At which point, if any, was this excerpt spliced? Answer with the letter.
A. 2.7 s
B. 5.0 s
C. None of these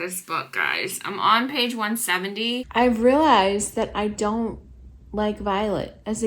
A